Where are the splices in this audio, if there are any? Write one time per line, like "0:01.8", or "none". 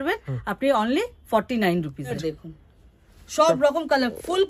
0:02.2